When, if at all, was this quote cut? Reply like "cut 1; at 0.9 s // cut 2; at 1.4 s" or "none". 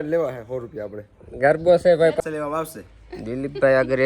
cut 1; at 2.2 s

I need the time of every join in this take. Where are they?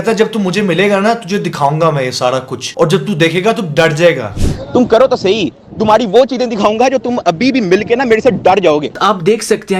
cut 1; at 8.9 s

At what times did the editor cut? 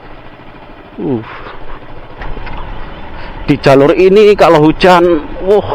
cut 1; at 2.2 s

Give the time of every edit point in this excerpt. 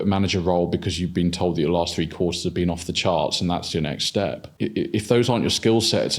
cut 1; at 4.5 s

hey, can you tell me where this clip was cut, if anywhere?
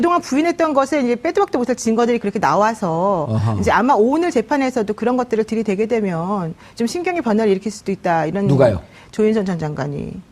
cut 1; at 6.2 s

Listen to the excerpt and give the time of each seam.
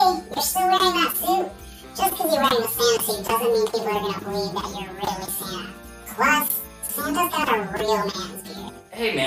none

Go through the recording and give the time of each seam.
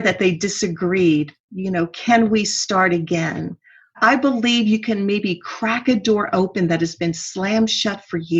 cut 1; at 4.0 s

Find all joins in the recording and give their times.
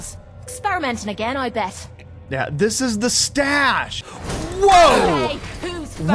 cut 1; at 3.9 s

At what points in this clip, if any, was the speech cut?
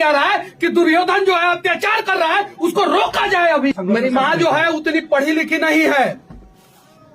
cut 1; at 3.7 s

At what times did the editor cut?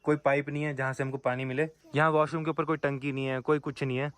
cut 1; at 1.8 s

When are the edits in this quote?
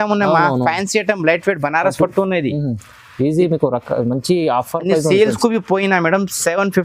none

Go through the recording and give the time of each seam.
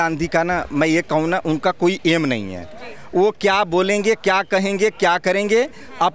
none

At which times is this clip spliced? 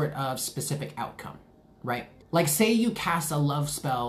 cut 1; at 2.1 s

